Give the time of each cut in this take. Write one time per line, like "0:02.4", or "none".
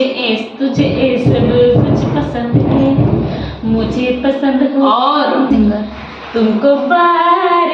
0:05.5